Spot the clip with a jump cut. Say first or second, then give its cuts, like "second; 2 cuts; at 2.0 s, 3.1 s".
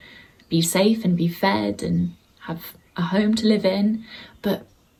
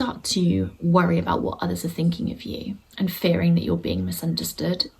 second; 1 cut; at 2.8 s